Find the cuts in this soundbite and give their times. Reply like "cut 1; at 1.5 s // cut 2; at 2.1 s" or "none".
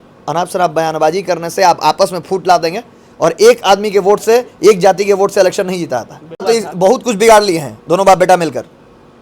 cut 1; at 6.4 s

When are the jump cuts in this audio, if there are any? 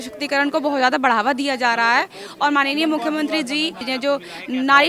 cut 1; at 3.9 s

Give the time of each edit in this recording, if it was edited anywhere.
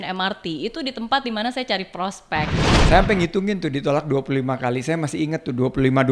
cut 1; at 2.7 s

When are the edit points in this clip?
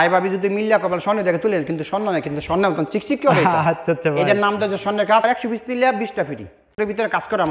cut 1; at 5.2 s // cut 2; at 6.8 s

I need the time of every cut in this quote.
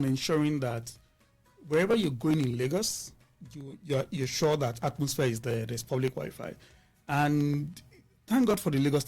none

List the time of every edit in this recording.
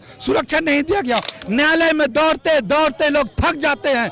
cut 1; at 1.3 s

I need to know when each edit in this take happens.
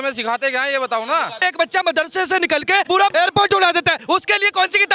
cut 1; at 1.4 s // cut 2; at 2.9 s

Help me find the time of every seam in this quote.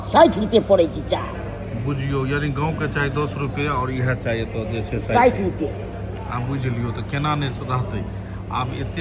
none

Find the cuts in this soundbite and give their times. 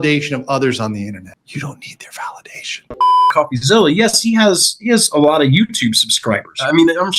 cut 1; at 3.3 s

